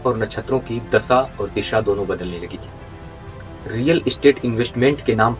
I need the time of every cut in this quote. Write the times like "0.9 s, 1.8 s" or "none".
3.5 s

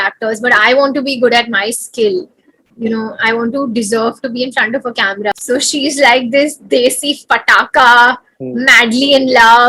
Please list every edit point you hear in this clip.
5.3 s

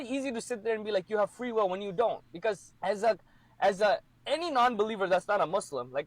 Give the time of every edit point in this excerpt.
2.7 s

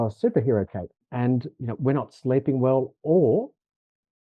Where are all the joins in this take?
1.1 s

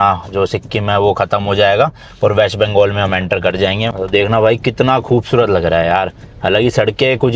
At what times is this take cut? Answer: 4.0 s

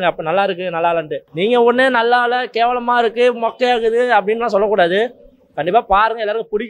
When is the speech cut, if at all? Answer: 1.2 s

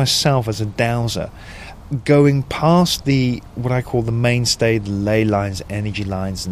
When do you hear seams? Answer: none

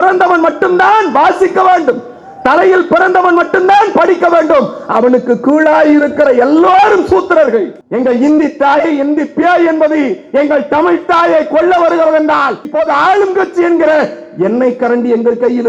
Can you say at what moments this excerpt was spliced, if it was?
7.8 s, 12.7 s

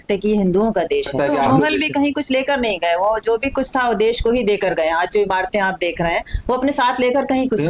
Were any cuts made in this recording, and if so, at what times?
1.1 s

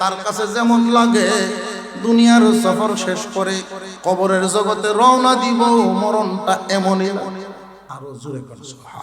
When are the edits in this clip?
7.8 s

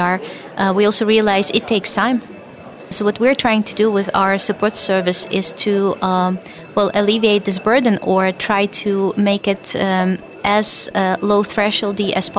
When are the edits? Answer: 2.4 s

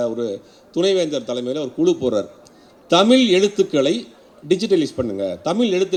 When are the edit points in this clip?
none

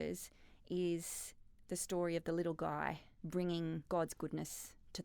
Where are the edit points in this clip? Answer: 3.1 s, 3.8 s

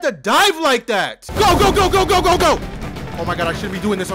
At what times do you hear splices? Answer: 1.2 s

